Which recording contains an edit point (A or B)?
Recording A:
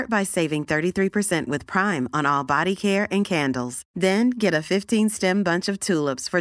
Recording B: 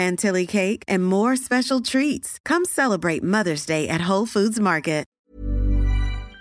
B